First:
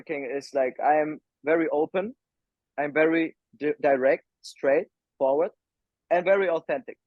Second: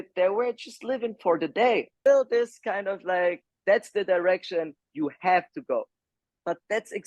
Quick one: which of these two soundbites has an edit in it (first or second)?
second